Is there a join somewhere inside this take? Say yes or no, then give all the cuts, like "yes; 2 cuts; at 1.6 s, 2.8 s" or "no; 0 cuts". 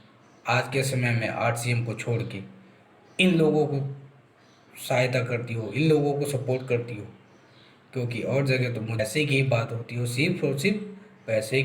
yes; 1 cut; at 9.0 s